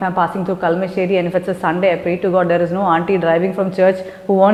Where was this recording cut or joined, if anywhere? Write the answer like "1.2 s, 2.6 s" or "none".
none

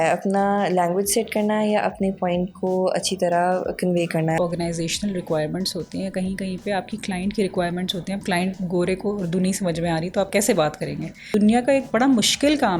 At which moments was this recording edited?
4.4 s, 11.3 s

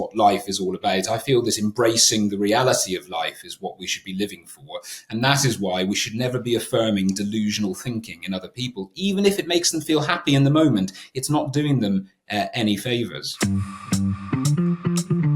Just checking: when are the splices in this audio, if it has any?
13.2 s

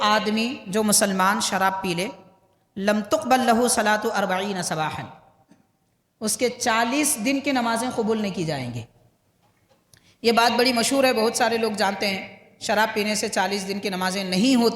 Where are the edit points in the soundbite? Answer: none

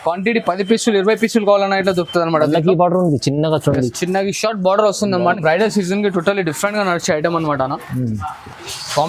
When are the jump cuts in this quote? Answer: 5.3 s

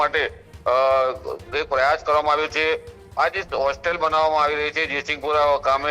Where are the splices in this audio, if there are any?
none

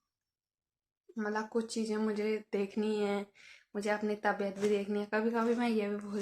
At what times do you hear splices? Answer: none

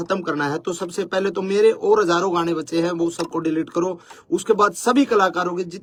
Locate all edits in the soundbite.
none

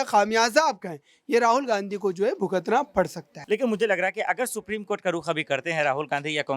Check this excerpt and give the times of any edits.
3.3 s

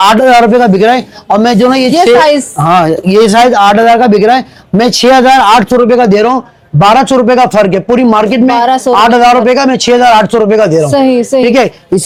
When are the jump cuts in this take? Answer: none

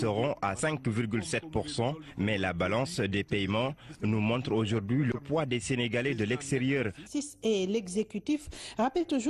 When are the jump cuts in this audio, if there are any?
none

